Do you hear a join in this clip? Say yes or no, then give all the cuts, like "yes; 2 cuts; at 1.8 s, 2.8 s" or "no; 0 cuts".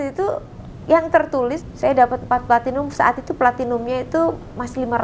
yes; 1 cut; at 1.6 s